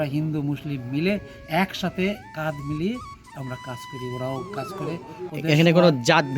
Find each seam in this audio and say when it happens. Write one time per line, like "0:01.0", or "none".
0:05.3